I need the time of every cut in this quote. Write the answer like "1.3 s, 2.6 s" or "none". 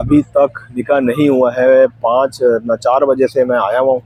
none

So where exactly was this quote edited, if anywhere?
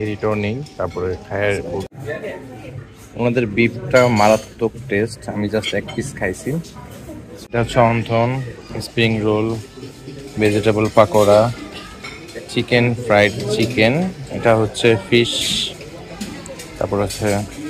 1.9 s, 7.4 s

